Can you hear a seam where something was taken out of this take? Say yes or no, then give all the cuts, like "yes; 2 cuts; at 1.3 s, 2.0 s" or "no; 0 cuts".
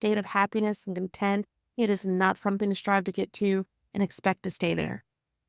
yes; 1 cut; at 1.5 s